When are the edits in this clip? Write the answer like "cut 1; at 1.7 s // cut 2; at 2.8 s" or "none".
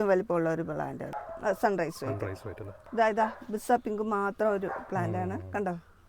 cut 1; at 1.2 s // cut 2; at 2.8 s